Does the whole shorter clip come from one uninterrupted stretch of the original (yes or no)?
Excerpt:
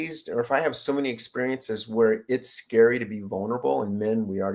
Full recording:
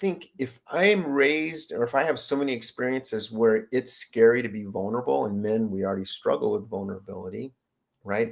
yes